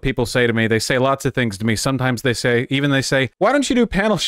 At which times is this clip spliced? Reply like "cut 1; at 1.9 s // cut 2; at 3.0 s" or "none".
cut 1; at 3.3 s